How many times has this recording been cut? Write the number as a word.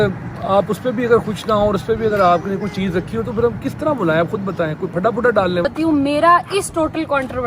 one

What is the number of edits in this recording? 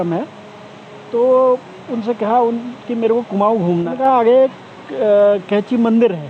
one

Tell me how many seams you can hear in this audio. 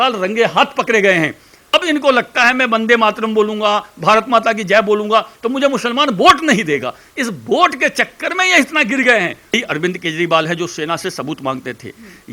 two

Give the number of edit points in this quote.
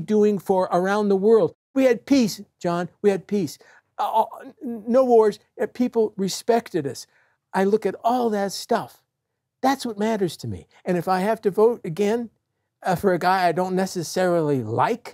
one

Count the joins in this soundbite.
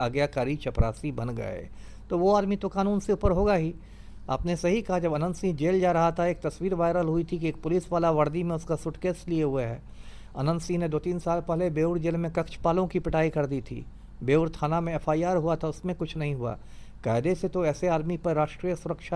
zero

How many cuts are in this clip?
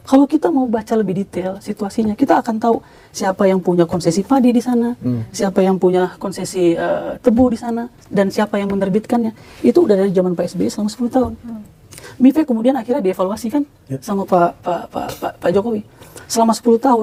zero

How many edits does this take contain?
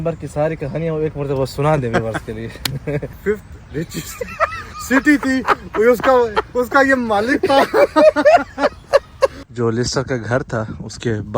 two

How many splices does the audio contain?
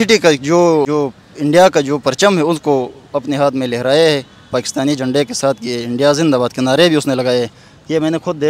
zero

